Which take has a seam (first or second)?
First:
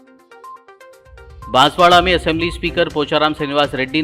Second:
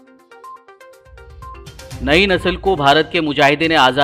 first